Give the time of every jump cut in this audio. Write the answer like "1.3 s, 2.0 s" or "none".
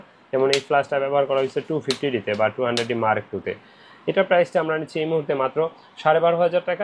none